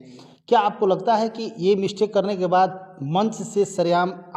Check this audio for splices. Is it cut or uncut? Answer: uncut